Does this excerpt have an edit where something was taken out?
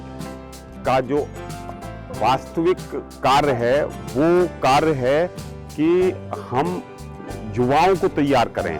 no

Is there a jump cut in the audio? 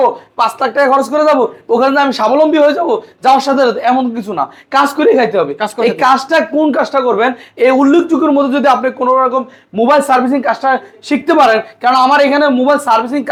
no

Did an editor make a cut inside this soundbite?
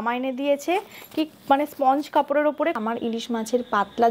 yes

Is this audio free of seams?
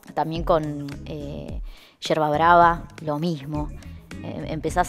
yes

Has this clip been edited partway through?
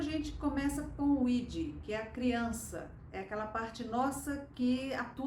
no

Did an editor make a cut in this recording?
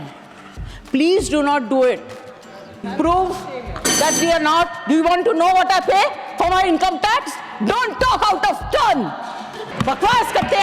yes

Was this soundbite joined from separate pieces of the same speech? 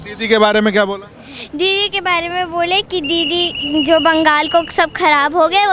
no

